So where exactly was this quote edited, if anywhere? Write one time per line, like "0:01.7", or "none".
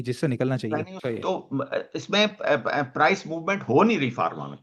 0:00.9